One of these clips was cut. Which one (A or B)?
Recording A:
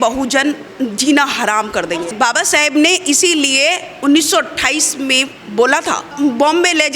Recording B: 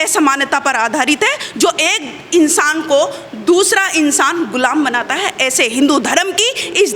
A